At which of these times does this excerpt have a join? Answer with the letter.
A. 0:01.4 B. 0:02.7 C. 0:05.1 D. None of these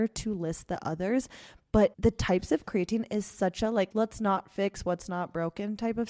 D